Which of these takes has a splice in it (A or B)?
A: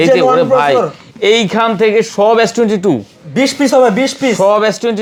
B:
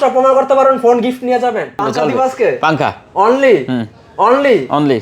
B